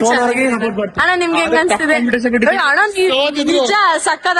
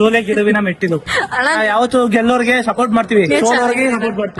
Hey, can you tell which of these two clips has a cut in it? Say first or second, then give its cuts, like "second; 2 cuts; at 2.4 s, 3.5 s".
second; 1 cut; at 1.2 s